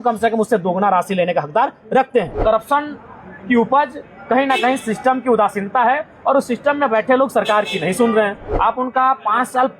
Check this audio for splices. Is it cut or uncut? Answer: cut